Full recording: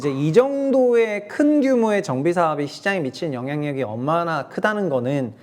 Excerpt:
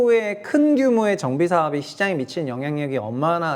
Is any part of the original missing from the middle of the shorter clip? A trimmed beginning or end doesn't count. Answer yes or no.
no